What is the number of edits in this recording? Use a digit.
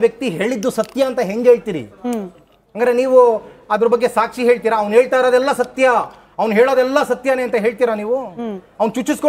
0